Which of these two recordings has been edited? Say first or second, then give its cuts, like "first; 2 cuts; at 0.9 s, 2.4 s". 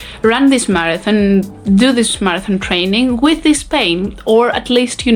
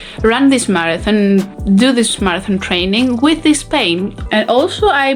second; 1 cut; at 4.2 s